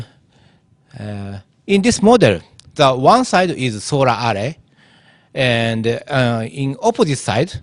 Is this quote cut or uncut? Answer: cut